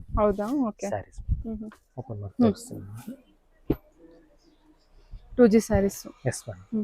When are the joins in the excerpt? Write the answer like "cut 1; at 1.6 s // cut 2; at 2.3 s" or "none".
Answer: cut 1; at 1.9 s